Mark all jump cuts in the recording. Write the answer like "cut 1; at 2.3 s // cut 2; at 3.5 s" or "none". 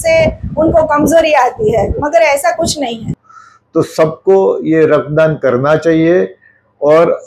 cut 1; at 3.2 s